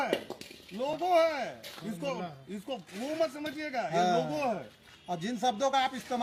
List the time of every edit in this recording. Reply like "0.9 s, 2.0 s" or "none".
none

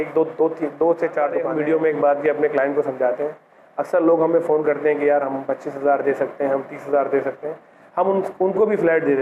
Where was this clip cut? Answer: 1.5 s

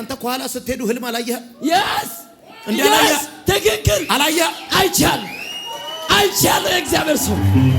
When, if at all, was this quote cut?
none

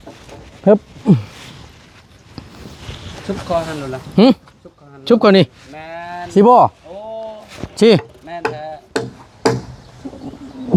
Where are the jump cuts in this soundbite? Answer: none

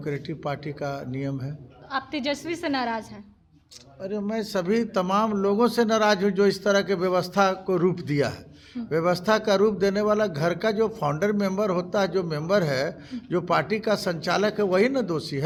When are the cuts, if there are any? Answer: none

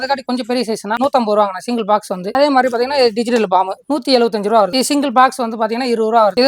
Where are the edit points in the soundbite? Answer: 0.9 s, 2.2 s, 4.7 s

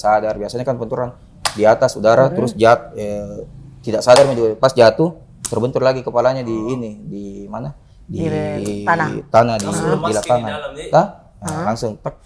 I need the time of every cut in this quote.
none

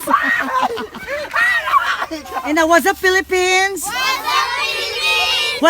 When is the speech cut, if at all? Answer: 2.4 s

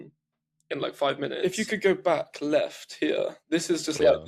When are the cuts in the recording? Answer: 1.4 s

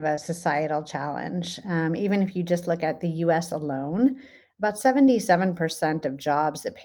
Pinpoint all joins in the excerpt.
none

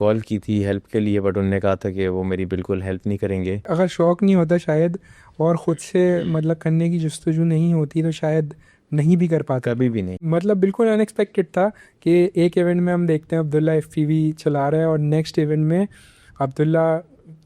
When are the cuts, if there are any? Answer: 3.7 s, 10.2 s

